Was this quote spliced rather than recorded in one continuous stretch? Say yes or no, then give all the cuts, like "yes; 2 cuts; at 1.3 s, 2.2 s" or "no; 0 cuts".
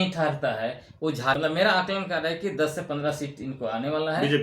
yes; 1 cut; at 0.9 s